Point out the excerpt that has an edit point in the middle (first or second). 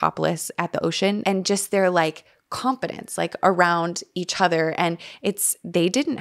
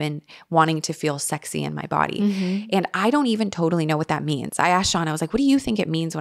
first